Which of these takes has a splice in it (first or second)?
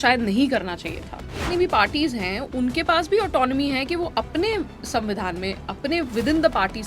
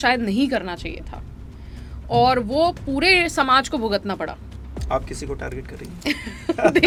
first